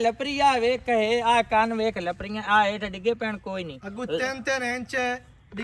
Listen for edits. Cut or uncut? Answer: uncut